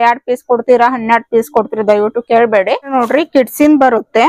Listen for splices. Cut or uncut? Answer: cut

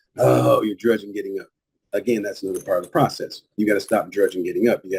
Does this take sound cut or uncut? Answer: uncut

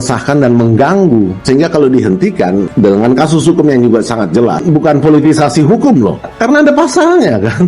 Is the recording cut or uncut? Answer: cut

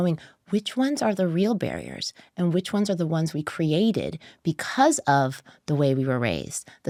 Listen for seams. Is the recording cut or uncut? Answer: uncut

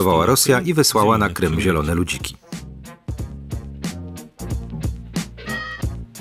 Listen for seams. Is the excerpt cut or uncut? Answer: uncut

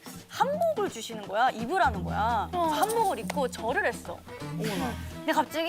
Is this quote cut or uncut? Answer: uncut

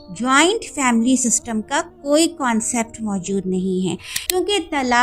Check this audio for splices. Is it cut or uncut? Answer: cut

